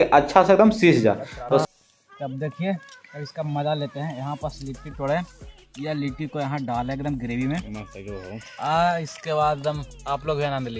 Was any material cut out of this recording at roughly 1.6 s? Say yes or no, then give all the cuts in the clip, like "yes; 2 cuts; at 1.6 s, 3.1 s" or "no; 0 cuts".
yes; 1 cut; at 1.6 s